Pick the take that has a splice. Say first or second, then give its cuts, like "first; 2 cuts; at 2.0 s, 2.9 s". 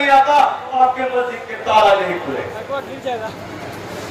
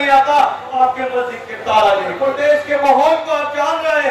second; 1 cut; at 2.2 s